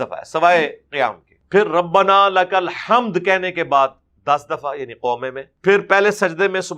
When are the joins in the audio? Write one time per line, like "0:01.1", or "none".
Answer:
0:01.3
0:05.5

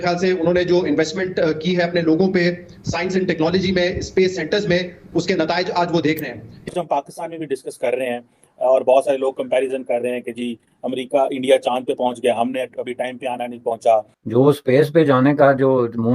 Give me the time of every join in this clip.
0:06.5
0:14.2

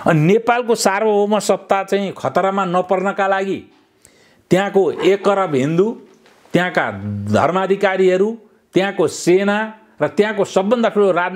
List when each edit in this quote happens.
none

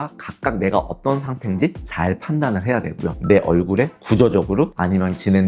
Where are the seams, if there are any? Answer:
0:03.1

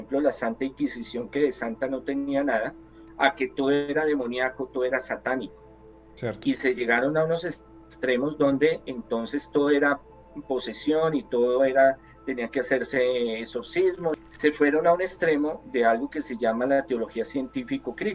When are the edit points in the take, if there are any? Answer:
0:14.2

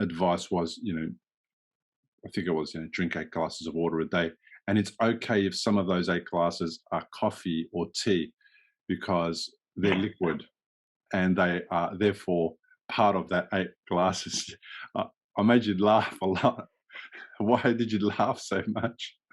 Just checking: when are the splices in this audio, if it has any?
none

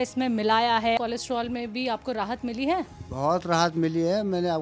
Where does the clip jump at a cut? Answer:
0:01.0

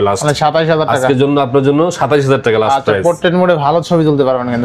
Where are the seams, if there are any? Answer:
none

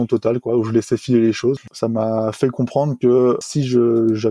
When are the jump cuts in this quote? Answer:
0:01.7
0:03.4

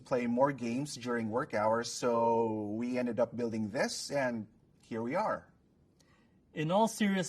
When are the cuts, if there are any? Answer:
0:03.7

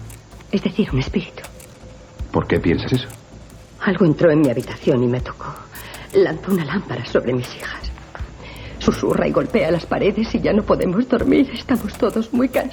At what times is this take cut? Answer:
none

